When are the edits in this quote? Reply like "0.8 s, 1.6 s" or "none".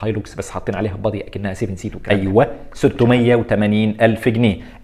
1.9 s